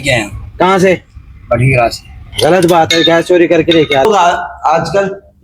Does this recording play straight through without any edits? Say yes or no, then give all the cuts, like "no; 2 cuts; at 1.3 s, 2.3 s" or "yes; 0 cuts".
no; 1 cut; at 4.0 s